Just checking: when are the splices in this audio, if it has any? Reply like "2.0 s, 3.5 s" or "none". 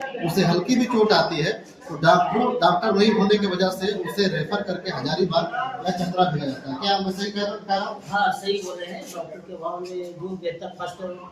none